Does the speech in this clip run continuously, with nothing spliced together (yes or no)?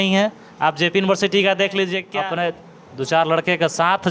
no